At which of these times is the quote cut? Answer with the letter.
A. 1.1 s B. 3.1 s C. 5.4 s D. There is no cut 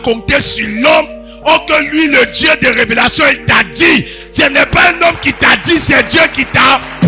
D